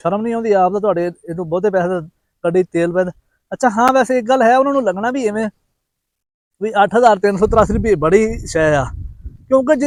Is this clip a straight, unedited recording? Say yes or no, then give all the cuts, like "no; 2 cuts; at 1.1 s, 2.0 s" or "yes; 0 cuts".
yes; 0 cuts